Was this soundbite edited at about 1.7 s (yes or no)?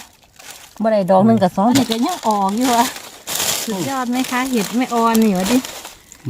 yes